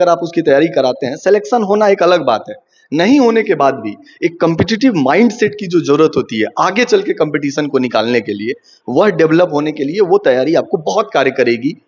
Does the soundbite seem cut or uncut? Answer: uncut